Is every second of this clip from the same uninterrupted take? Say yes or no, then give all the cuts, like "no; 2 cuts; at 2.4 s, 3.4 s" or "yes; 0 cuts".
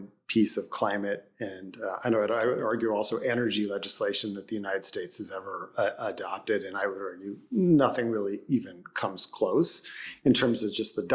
yes; 0 cuts